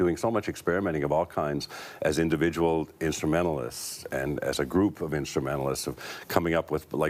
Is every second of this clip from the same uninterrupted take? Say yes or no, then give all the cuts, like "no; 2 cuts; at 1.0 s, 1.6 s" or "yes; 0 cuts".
no; 1 cut; at 5.9 s